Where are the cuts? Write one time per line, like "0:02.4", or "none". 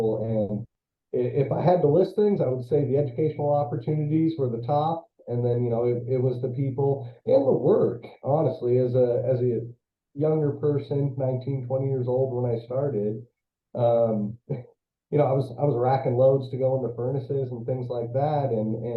none